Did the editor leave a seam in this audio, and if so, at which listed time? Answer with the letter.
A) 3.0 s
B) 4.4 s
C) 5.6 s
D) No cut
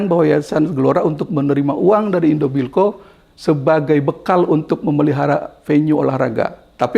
D